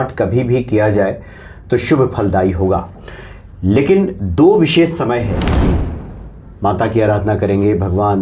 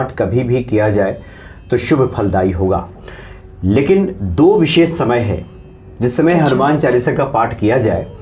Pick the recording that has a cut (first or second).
first